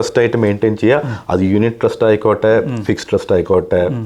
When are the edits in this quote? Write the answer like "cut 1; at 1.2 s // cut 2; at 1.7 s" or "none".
none